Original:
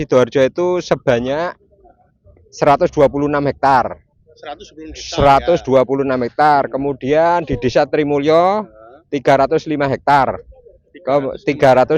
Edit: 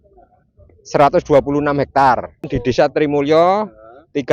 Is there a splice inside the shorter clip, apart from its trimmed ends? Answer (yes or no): yes